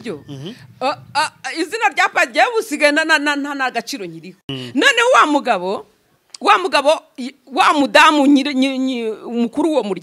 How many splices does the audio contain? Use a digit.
1